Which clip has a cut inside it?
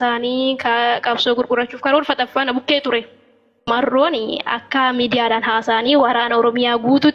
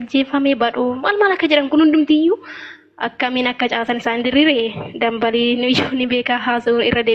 first; 1 cut; at 3.6 s

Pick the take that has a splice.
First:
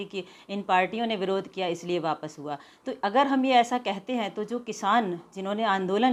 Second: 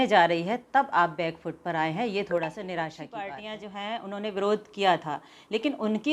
second; 1 cut; at 3.4 s

